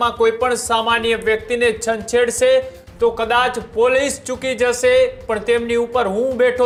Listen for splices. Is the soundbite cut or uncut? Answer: uncut